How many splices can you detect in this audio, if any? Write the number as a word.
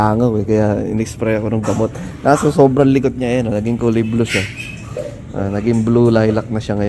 zero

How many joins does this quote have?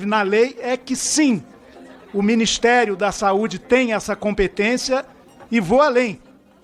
zero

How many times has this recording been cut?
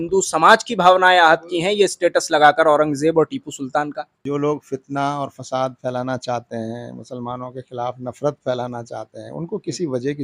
one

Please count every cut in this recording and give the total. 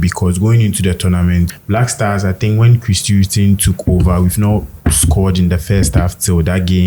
one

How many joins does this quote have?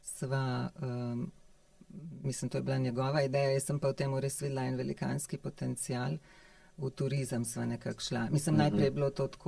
zero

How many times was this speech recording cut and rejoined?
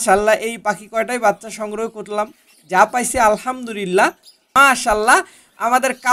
one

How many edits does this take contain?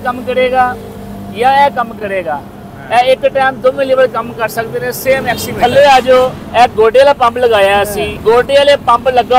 three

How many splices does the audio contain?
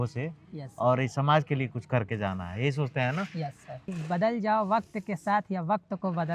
one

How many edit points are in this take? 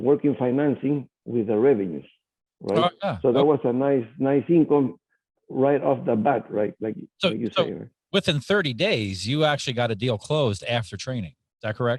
zero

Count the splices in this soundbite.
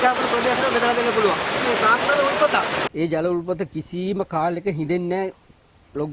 two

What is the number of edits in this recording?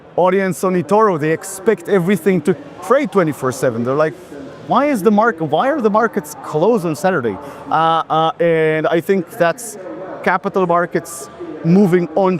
zero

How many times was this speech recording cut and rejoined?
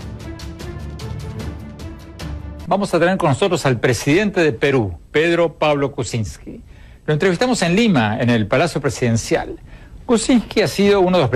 zero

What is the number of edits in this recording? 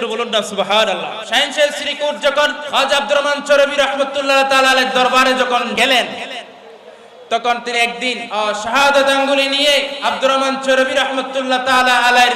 five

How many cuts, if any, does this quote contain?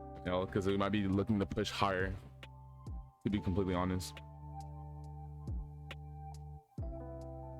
one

